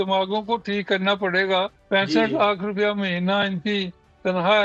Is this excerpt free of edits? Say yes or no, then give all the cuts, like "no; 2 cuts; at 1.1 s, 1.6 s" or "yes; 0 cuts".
no; 1 cut; at 1.8 s